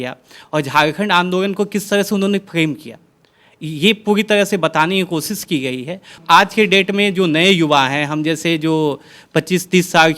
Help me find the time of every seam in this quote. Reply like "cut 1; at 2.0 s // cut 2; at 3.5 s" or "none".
cut 1; at 6.1 s